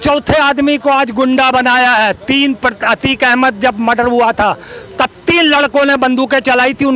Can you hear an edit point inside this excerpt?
no; 0 cuts

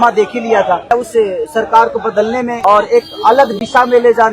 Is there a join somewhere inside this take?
yes; 2 cuts; at 0.9 s, 2.5 s

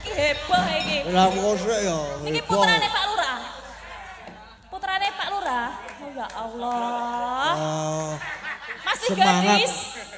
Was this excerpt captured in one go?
yes; 0 cuts

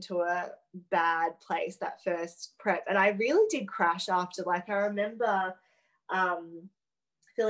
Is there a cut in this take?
no; 0 cuts

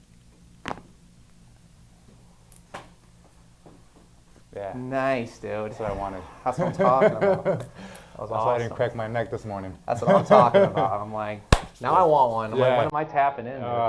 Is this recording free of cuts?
yes; 0 cuts

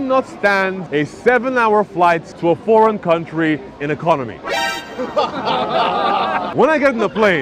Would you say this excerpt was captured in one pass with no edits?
no; 3 cuts; at 0.8 s, 2.3 s, 6.5 s

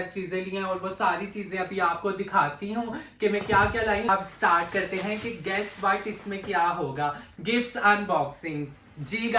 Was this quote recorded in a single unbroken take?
no; 1 cut; at 4.1 s

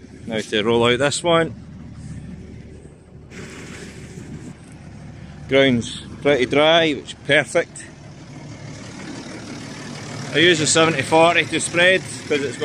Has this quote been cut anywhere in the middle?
no; 0 cuts

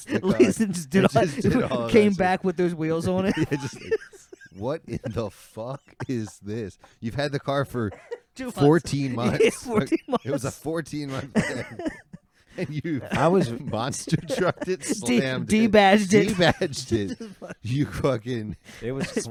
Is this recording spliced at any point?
no; 0 cuts

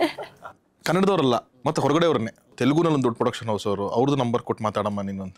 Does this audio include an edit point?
yes; 1 cut; at 2.5 s

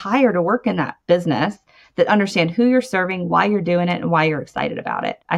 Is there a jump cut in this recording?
yes; 1 cut; at 1.0 s

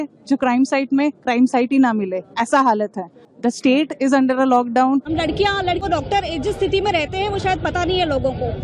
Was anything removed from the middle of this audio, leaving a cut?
yes; 2 cuts; at 3.3 s, 5.6 s

